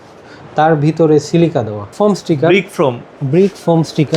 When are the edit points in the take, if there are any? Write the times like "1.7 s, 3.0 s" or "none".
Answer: 1.9 s